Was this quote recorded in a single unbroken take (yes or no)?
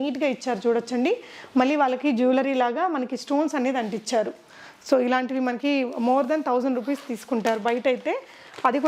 yes